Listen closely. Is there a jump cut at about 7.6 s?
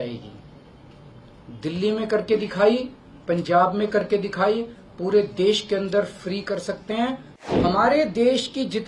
yes; 1 cut; at 7.6 s

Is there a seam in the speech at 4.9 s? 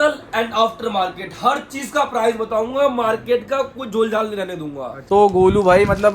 yes; 1 cut; at 4.9 s

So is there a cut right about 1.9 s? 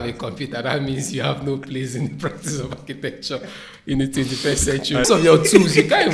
no; 1 cut; at 5.0 s

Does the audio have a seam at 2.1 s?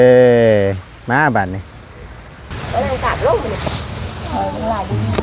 no; 1 cut; at 3.6 s

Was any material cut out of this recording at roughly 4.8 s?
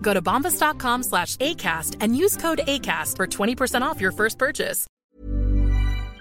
yes; 1 cut; at 4.8 s

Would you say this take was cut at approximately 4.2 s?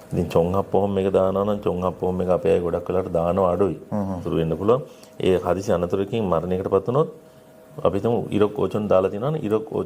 yes; 1 cut; at 4.2 s

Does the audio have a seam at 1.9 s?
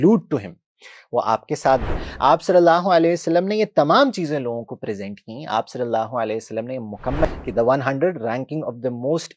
yes; 2 cuts; at 1.9 s, 7.2 s

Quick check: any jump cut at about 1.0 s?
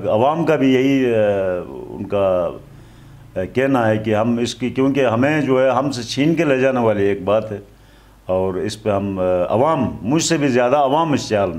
no; 0 cuts

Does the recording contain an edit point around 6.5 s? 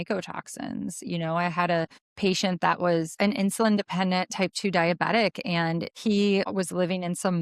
yes; 4 cuts; at 2.0 s, 3.1 s, 5.9 s, 6.5 s

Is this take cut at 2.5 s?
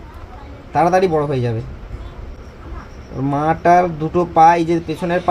no; 0 cuts

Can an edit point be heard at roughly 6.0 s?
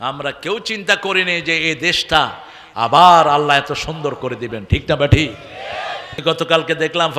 yes; 1 cut; at 6.0 s

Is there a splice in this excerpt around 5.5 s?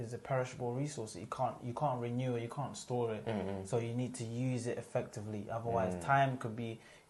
no; 0 cuts

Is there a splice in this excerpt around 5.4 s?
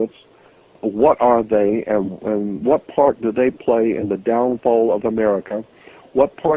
no; 1 cut; at 1.2 s

